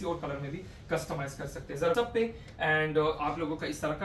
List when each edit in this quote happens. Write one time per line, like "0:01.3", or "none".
0:01.9